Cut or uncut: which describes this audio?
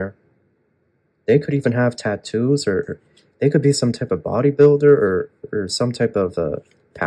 uncut